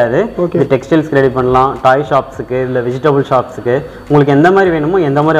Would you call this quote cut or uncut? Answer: uncut